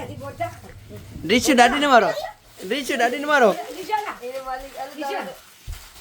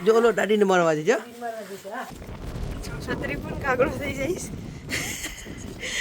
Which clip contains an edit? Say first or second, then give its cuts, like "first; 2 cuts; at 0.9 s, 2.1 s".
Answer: second; 1 cut; at 2.1 s